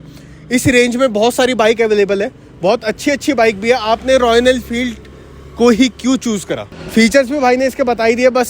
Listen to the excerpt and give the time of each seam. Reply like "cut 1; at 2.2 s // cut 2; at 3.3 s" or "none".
cut 1; at 6.8 s